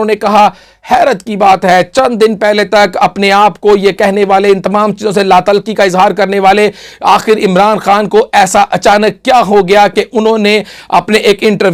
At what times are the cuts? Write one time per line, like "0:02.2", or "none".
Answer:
none